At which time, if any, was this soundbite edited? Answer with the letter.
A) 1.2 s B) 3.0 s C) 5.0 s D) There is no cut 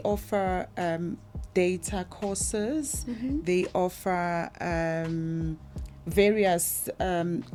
D